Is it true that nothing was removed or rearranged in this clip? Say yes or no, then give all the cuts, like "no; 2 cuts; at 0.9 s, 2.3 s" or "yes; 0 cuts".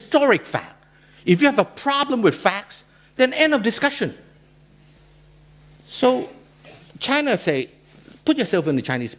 no; 1 cut; at 5.6 s